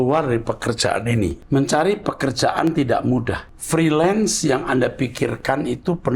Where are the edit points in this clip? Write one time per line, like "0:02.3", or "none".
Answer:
0:01.4
0:03.5